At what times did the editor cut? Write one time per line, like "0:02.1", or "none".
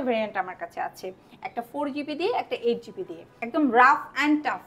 0:03.4